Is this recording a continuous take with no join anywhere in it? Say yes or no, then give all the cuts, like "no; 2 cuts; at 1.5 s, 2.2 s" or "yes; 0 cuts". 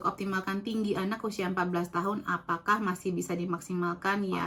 yes; 0 cuts